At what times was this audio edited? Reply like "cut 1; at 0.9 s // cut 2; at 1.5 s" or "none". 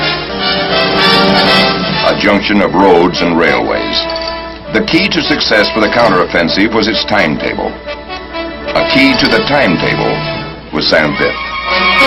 cut 1; at 9.9 s